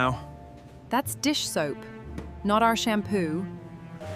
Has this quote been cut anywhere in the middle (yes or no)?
no